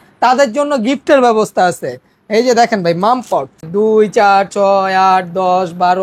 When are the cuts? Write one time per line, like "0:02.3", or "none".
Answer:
0:03.6

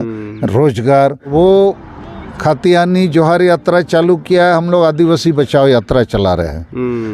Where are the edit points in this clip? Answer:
0:01.3

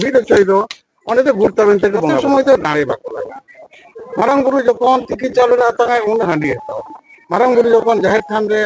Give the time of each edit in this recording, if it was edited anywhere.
0:02.2

